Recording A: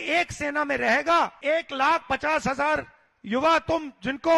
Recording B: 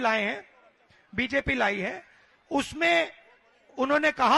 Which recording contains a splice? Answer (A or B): A